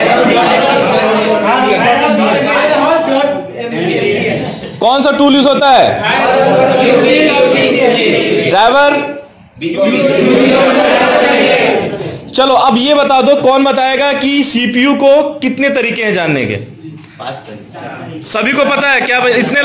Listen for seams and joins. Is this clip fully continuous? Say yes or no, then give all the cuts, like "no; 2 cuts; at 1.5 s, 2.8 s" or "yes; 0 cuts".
yes; 0 cuts